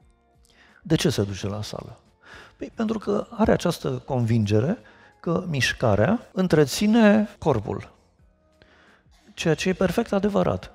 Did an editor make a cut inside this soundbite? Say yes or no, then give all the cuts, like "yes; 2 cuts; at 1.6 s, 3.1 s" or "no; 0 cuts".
yes; 2 cuts; at 6.3 s, 7.3 s